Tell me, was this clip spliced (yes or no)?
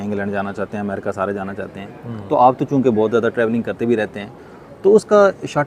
no